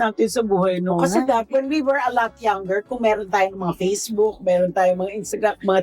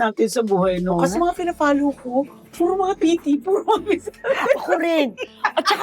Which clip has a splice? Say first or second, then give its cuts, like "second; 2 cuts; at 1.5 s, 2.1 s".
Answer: second; 2 cuts; at 1.1 s, 3.0 s